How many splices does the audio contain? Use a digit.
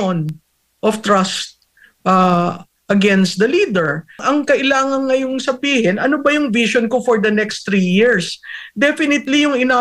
1